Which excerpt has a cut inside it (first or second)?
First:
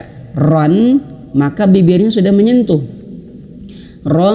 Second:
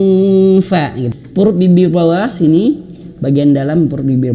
second